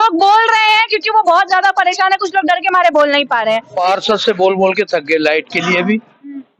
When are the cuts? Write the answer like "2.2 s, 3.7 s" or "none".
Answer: 3.7 s

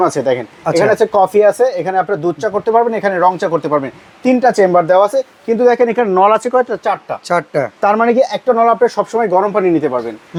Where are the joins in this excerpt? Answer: none

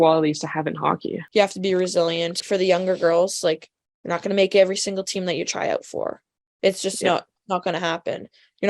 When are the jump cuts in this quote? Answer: 1.1 s, 2.4 s

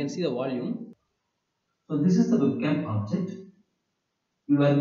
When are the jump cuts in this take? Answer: 0.9 s

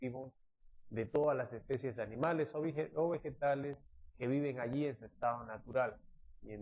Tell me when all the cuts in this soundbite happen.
1.2 s

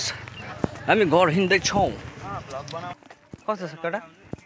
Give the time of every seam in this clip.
3.1 s

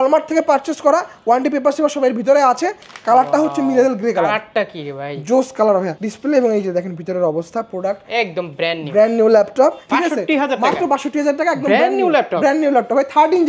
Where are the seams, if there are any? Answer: 2.9 s, 6.0 s, 9.8 s

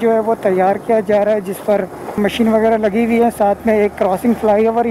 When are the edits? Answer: 2.2 s

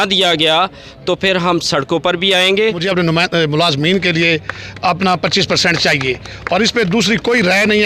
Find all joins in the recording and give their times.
2.8 s

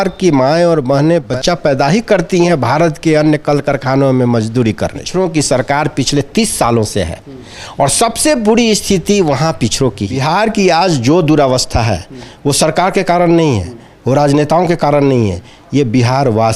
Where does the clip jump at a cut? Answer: 1.3 s, 5.0 s, 10.2 s

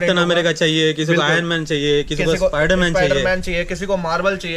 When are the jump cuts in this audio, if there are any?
none

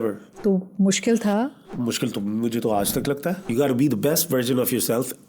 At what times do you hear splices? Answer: 1.6 s, 3.4 s

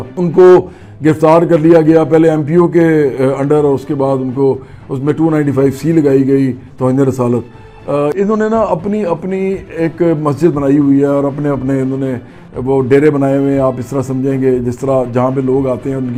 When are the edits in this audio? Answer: none

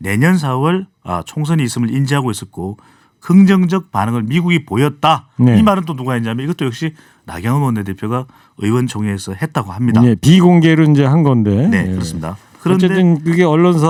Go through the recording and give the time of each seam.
none

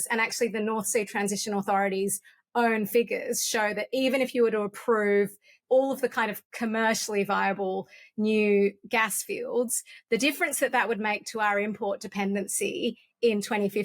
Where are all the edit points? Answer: 5.6 s

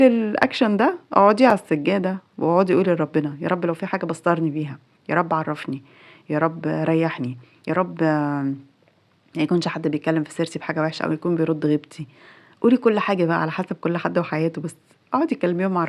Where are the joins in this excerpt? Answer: none

